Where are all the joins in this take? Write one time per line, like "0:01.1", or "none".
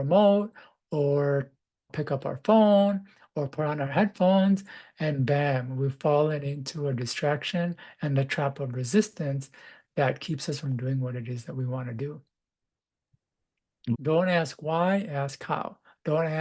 0:01.9
0:13.8